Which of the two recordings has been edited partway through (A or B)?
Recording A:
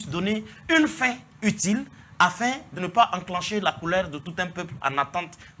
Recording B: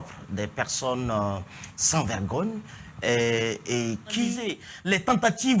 B